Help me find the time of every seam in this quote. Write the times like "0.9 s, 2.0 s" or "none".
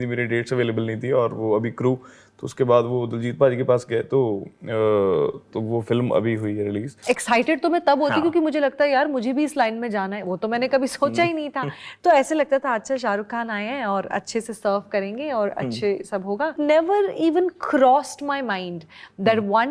7.0 s